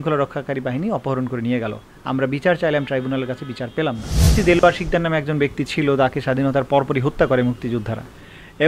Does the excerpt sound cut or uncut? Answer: cut